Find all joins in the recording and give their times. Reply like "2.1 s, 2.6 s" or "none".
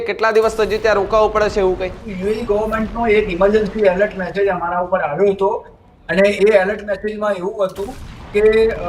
2.1 s